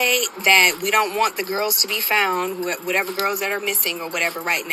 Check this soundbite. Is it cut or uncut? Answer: uncut